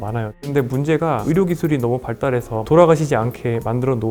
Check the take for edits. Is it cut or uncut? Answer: cut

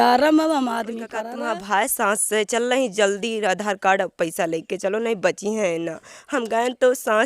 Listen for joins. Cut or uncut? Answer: cut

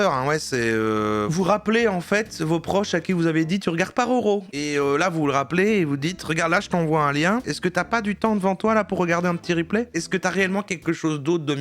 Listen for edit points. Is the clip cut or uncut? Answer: cut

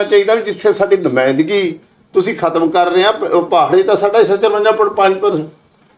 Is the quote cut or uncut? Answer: uncut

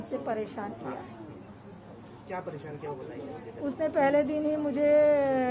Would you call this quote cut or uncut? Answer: uncut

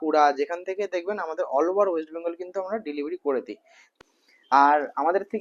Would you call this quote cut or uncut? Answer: cut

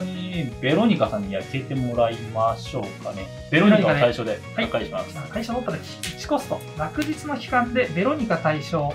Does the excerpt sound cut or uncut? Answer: uncut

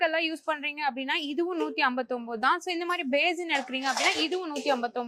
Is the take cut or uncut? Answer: uncut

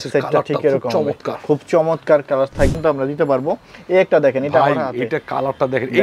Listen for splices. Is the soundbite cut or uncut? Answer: cut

